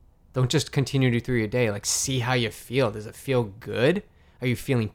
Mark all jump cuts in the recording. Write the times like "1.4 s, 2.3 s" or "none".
none